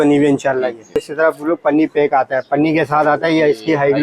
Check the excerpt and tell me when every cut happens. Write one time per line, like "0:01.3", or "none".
0:01.0